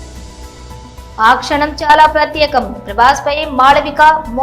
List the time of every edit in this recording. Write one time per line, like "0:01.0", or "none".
none